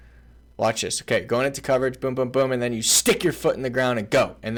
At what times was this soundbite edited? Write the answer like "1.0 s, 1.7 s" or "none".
none